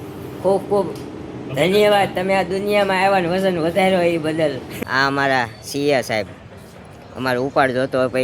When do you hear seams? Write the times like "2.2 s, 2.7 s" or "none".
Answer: 4.7 s